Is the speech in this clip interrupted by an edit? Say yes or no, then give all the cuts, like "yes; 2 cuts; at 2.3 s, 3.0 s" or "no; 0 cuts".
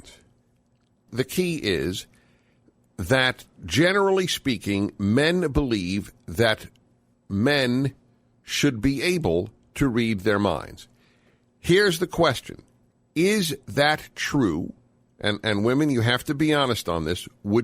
yes; 1 cut; at 1.1 s